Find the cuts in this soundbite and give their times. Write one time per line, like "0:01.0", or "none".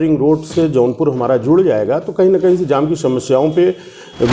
none